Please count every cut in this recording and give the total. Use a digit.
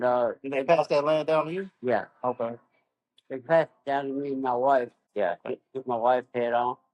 1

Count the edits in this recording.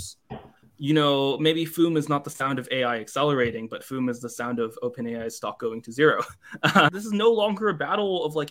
1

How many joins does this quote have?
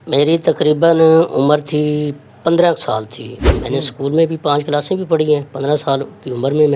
0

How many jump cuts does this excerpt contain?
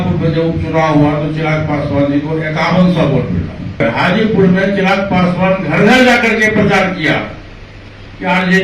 1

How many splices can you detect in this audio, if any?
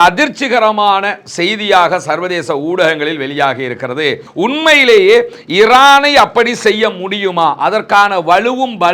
1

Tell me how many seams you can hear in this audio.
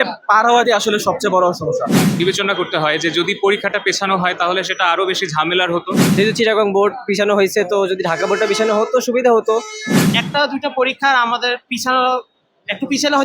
3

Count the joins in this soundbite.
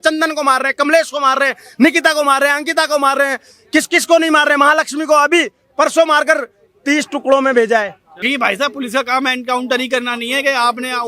1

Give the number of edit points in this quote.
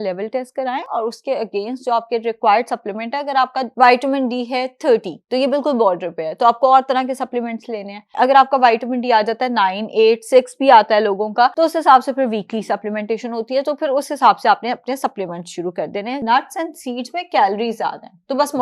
4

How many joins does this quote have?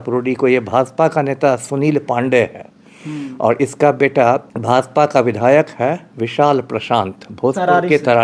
1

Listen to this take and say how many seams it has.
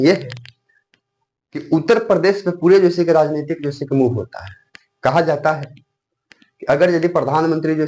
0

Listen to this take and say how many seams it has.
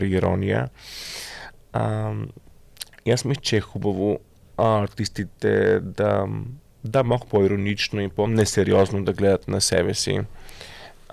0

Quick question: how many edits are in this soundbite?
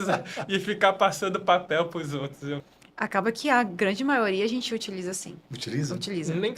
1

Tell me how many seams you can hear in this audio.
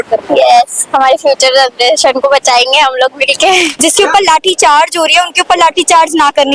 1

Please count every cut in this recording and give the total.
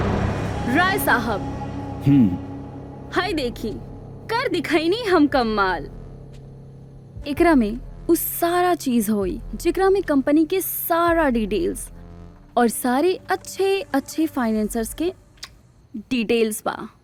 0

